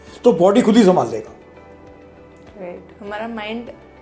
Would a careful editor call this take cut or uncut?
uncut